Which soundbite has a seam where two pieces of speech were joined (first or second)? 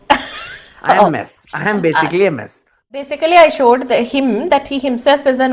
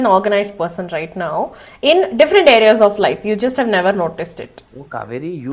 first